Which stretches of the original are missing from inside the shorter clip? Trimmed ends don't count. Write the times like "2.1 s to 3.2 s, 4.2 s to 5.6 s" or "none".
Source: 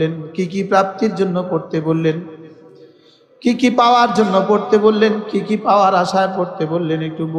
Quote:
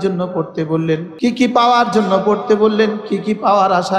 2.2 s to 3.3 s

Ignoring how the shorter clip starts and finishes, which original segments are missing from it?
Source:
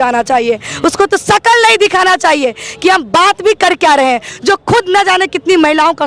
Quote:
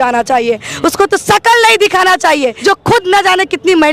2.6 s to 4.4 s

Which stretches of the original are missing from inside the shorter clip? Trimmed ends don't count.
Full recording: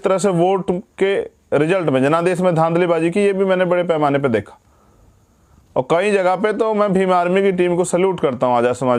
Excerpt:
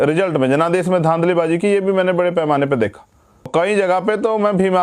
5.0 s to 5.9 s

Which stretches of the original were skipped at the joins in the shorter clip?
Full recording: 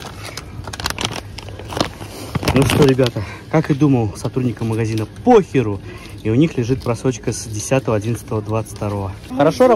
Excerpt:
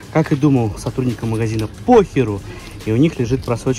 none

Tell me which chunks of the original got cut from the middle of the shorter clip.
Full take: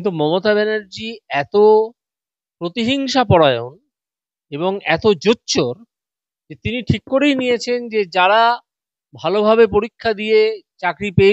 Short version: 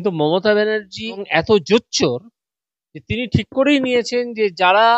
1.2 s to 4.8 s

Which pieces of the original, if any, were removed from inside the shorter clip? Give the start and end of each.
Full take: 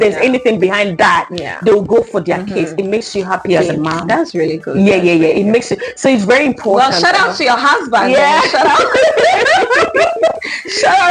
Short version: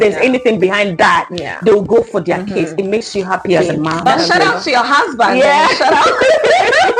4.1 s to 6.8 s

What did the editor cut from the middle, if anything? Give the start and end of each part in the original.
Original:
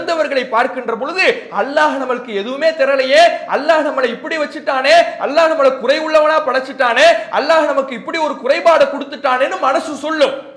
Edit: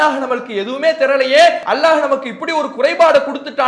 3.4 s to 7.3 s

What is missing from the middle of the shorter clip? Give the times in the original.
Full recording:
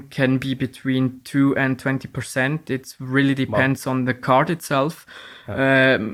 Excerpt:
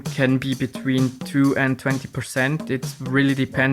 none

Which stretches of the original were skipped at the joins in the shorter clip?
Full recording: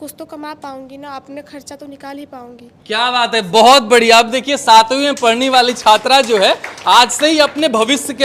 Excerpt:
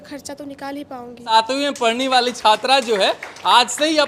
2.7 s to 4.6 s

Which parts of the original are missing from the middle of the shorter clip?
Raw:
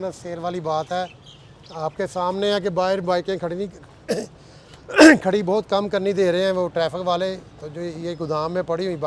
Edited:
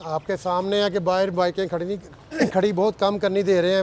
4.1 s to 5.1 s

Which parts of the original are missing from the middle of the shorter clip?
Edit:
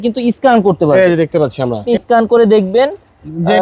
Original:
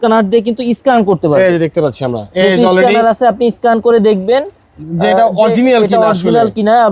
2.3 s to 3.4 s

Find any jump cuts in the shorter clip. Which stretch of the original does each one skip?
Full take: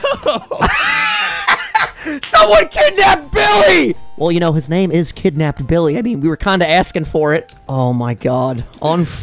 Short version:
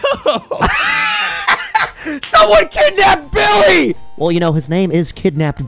none

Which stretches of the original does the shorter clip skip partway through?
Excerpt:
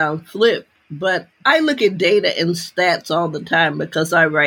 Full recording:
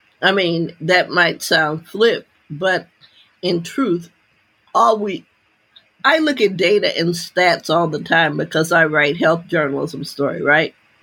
2.9 s to 5.9 s

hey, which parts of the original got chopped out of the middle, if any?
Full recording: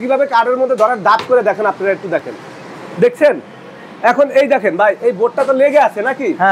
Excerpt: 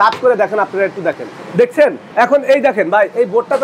2.4 s to 2.8 s, 3.5 s to 3.9 s

